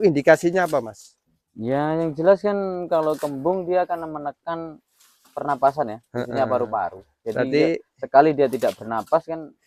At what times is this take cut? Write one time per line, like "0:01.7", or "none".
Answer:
none